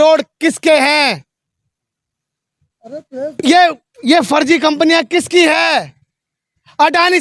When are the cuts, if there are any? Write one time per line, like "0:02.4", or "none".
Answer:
none